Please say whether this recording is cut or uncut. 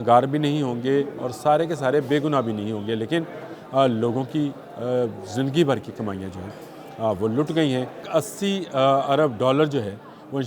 cut